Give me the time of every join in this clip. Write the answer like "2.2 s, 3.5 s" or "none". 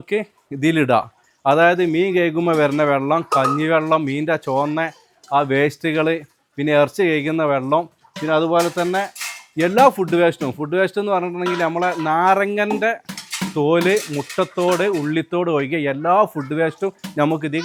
none

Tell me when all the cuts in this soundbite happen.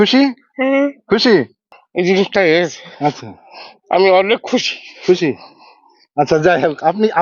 1.6 s

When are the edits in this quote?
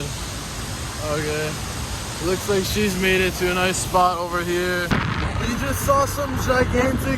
4.9 s

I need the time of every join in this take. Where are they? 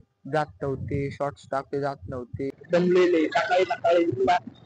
2.5 s

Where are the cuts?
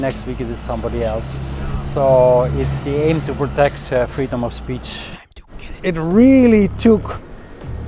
5.5 s

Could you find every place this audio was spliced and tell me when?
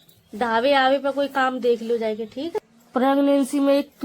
2.7 s

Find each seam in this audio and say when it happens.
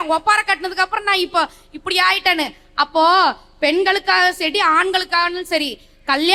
none

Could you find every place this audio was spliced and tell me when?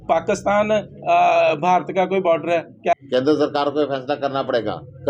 2.9 s

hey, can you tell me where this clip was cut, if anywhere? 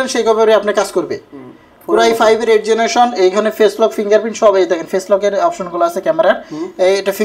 none

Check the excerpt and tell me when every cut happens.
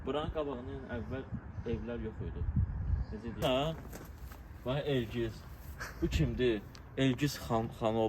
3.4 s

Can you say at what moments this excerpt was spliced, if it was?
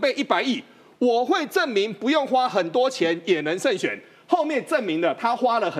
none

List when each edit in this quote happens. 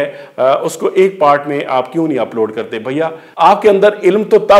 3.2 s

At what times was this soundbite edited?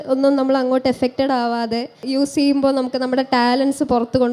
2.0 s

